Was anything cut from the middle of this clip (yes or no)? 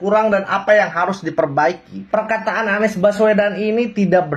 yes